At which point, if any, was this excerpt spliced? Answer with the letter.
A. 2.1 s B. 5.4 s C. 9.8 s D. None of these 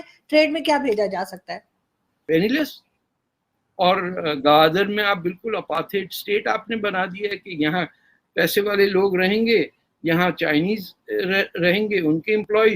A